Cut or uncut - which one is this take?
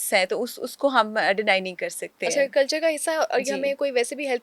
uncut